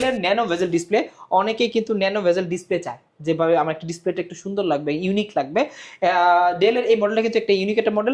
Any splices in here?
no; 0 cuts

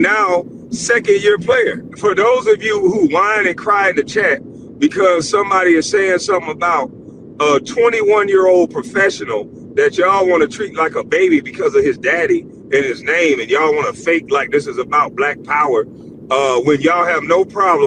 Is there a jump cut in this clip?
yes; 1 cut; at 1.8 s

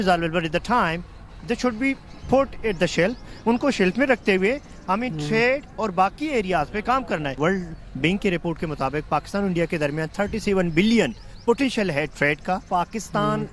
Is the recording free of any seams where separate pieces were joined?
no; 2 cuts; at 7.4 s, 12.6 s

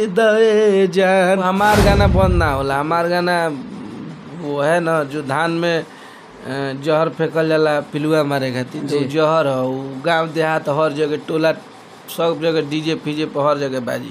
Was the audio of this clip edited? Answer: yes; 1 cut; at 1.4 s

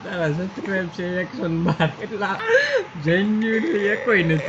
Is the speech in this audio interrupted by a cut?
yes; 1 cut; at 2.4 s

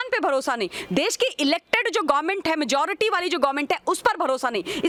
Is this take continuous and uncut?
yes; 0 cuts

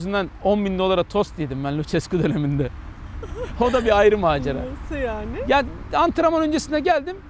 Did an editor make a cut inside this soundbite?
no; 0 cuts

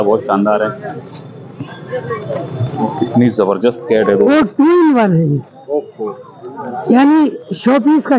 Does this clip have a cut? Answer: yes; 1 cut; at 4.3 s

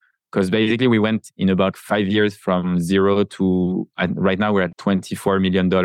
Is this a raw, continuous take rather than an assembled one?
no; 2 cuts; at 1.8 s, 4.7 s

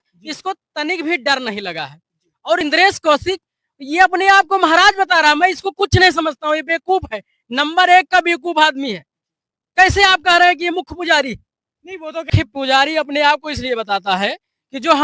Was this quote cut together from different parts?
yes; 2 cuts; at 2.6 s, 12.3 s

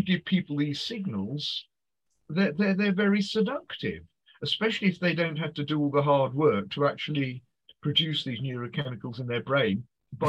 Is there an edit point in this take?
yes; 1 cut; at 8.9 s

